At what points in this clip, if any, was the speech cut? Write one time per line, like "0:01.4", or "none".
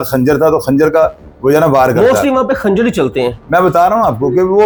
none